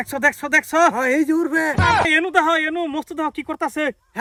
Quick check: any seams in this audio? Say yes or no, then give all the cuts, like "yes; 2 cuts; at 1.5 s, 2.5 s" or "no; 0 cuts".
no; 0 cuts